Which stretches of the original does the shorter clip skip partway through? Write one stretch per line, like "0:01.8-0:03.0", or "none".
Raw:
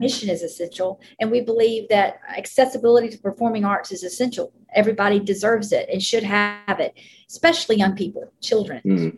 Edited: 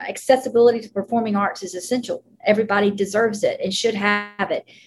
none